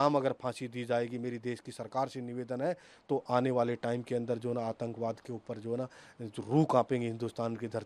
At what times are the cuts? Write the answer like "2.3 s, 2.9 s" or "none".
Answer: none